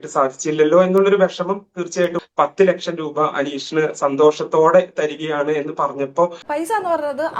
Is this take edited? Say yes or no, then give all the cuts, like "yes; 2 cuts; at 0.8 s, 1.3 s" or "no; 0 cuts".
yes; 2 cuts; at 2.2 s, 6.5 s